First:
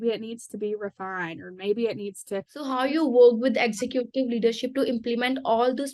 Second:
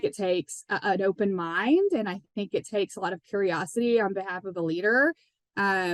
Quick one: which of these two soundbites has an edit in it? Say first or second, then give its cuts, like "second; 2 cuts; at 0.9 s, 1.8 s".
first; 1 cut; at 2.7 s